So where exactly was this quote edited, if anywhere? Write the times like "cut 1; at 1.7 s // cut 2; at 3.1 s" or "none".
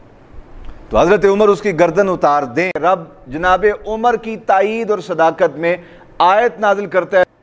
cut 1; at 2.7 s